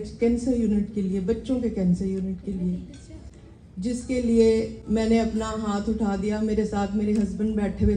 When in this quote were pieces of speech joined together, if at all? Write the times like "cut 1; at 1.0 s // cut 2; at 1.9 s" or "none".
none